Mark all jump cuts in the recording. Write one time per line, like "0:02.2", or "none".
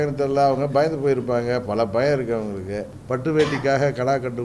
0:02.9